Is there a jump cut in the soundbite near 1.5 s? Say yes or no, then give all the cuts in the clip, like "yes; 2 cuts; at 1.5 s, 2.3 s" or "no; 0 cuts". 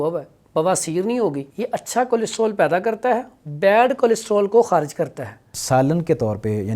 yes; 2 cuts; at 1.5 s, 5.5 s